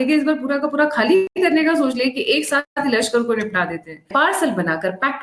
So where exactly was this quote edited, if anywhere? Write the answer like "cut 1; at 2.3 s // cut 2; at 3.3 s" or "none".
cut 1; at 1.3 s // cut 2; at 2.7 s // cut 3; at 4.1 s

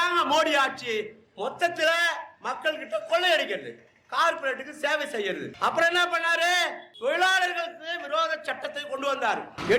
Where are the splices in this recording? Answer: none

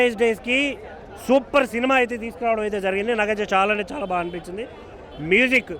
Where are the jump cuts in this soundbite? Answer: none

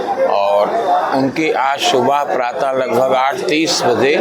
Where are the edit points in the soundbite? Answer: none

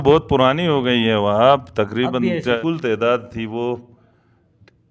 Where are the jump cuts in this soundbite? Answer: cut 1; at 2.6 s

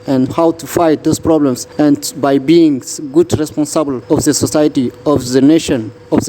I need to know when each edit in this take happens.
cut 1; at 1.6 s // cut 2; at 4.0 s

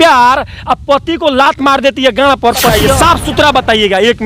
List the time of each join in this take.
cut 1; at 2.8 s

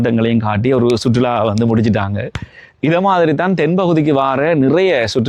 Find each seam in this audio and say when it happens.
none

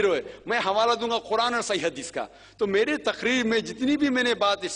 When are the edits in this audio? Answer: none

